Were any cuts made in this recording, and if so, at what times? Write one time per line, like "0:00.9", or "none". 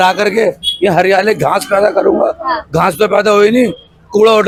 none